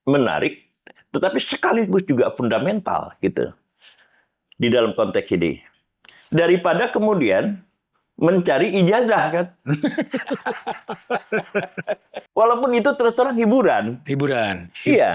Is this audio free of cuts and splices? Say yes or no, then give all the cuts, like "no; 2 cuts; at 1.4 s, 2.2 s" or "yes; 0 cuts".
no; 1 cut; at 12.1 s